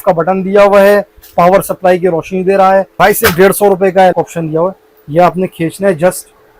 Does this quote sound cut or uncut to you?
cut